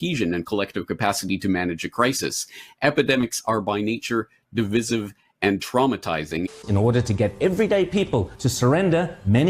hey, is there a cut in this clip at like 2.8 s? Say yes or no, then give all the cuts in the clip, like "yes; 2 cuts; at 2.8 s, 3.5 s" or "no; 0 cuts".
no; 1 cut; at 6.6 s